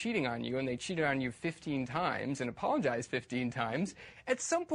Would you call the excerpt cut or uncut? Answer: uncut